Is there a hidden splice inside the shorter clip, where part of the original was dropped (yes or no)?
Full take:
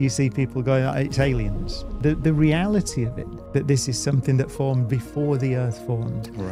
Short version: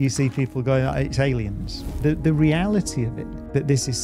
no